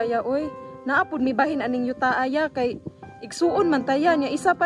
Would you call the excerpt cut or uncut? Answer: uncut